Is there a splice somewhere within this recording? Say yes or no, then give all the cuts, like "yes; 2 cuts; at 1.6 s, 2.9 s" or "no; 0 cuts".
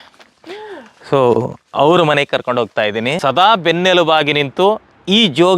yes; 1 cut; at 3.1 s